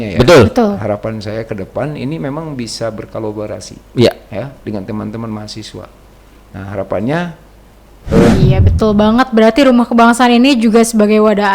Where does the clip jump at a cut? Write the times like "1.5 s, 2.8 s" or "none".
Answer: 8.3 s